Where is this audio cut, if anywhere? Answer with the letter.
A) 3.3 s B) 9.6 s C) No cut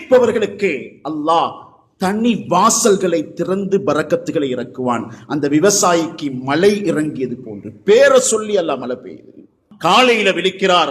B